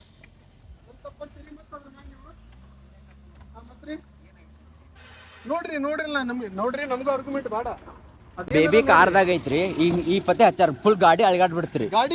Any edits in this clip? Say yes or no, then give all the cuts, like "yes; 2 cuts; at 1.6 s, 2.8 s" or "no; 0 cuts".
no; 0 cuts